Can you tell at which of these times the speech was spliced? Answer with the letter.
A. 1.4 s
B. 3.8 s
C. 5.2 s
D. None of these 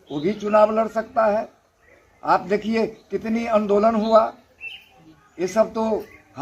D